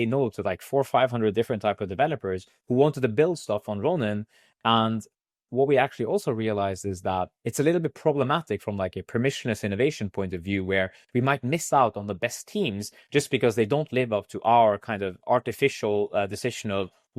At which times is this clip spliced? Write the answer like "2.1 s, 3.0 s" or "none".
none